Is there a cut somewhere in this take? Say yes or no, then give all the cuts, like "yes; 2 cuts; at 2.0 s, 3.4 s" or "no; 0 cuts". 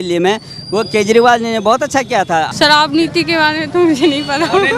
yes; 1 cut; at 2.5 s